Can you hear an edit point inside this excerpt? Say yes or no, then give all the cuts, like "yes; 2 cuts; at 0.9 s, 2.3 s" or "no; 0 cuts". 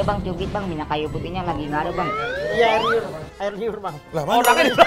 no; 0 cuts